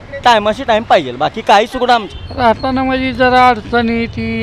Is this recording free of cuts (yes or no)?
no